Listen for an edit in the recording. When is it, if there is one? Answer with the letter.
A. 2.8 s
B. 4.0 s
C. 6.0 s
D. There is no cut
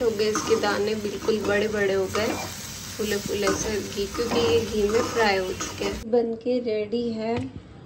C